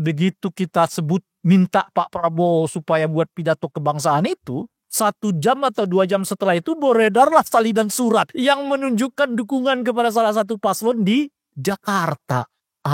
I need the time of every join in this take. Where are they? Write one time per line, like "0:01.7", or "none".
0:04.8
0:08.3